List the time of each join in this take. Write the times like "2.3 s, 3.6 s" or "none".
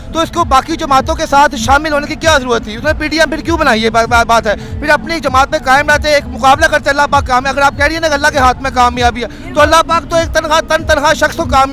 none